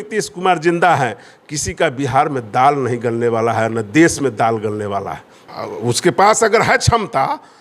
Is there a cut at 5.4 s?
yes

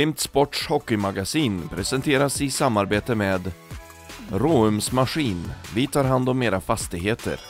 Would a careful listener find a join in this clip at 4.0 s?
no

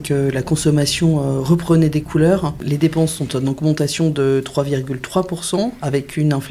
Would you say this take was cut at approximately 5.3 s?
no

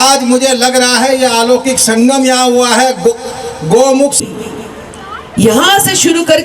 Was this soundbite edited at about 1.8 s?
no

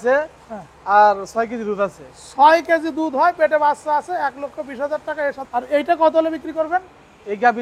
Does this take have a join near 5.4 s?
yes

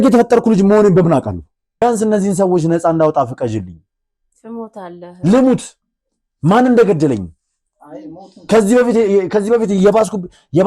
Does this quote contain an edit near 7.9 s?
no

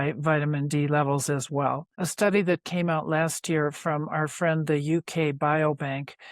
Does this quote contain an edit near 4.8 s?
no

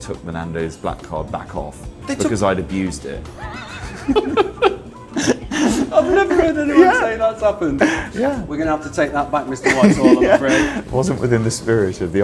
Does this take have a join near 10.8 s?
yes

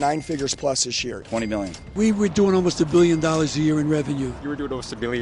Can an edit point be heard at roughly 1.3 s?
yes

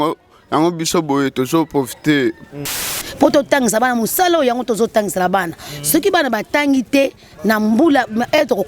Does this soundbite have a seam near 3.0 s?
yes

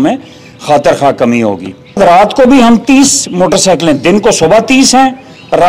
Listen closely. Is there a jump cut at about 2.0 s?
yes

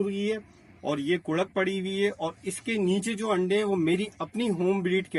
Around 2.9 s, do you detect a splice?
no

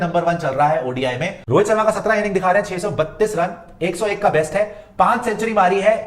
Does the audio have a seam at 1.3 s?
yes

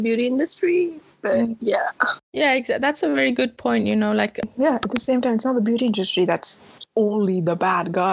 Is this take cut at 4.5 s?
yes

